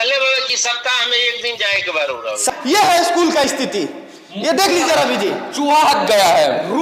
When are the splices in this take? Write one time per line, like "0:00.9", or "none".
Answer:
0:02.4